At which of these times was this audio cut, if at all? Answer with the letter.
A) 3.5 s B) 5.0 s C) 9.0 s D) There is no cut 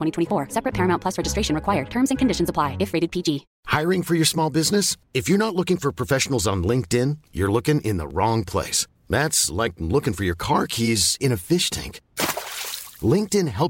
A